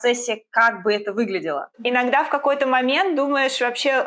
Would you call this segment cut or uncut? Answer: cut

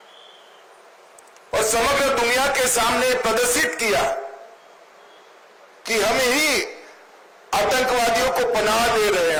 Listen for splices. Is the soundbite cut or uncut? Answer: uncut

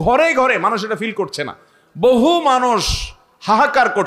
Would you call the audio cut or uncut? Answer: uncut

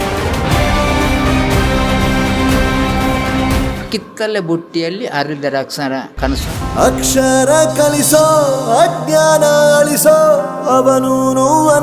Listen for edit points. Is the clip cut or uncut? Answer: uncut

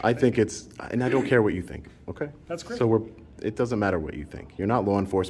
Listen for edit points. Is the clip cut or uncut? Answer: uncut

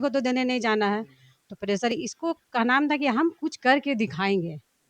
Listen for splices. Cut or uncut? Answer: uncut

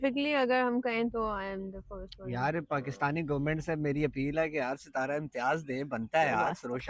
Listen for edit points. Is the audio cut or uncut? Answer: uncut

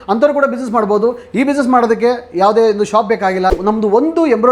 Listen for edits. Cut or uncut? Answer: cut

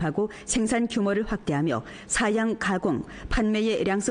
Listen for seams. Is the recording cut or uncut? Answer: cut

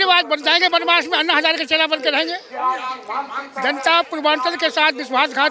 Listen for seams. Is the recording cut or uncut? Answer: uncut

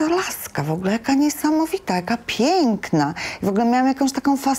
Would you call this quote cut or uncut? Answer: uncut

